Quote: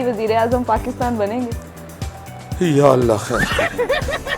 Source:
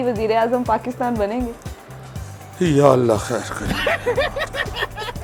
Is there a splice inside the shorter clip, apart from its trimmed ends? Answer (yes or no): yes